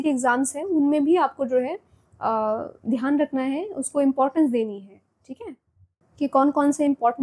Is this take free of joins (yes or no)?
no